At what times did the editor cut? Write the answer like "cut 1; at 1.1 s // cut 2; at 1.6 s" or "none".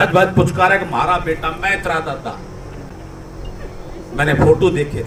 none